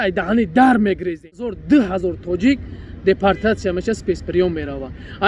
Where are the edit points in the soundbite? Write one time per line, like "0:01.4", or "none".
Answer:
0:01.6